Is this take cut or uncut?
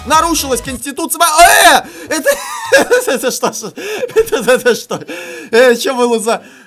uncut